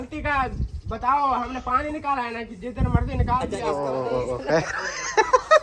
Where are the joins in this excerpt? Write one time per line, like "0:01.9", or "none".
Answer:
0:03.6